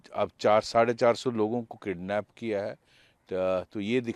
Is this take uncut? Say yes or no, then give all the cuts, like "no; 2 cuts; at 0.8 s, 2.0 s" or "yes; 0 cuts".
yes; 0 cuts